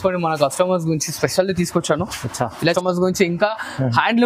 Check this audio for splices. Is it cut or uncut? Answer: cut